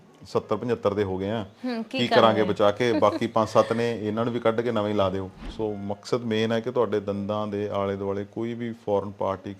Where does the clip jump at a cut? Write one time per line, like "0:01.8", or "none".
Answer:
0:05.3